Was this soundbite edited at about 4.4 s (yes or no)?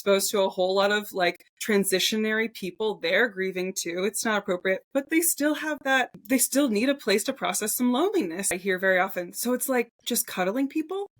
no